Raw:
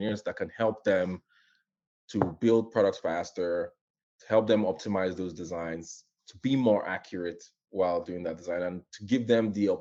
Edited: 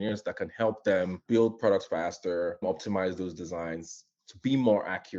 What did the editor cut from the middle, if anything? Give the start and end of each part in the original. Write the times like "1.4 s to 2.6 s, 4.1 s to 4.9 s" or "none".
1.2 s to 2.3 s, 3.8 s to 4.6 s